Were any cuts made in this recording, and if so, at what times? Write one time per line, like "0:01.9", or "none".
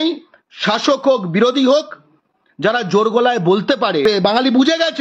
0:04.0

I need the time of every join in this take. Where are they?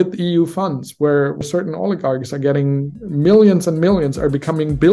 0:01.4

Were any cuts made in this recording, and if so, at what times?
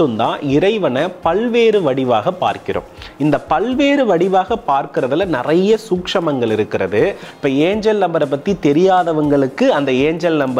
0:07.3

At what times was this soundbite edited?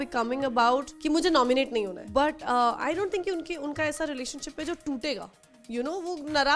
0:00.9
0:02.0

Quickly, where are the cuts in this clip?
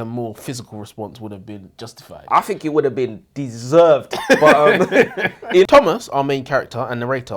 0:05.6

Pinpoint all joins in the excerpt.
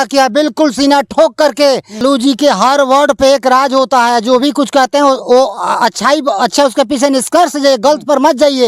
0:02.0

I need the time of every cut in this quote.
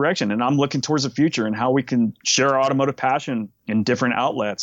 0:02.2
0:03.6

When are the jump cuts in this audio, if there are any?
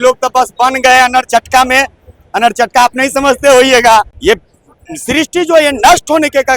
0:04.1

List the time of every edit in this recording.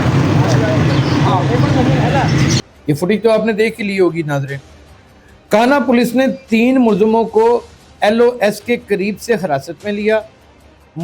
none

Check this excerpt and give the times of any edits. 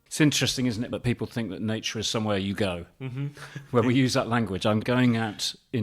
0:00.9
0:04.8

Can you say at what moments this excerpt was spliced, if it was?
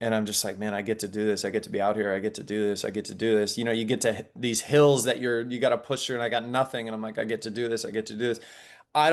none

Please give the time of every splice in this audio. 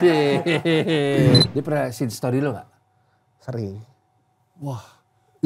0:01.4

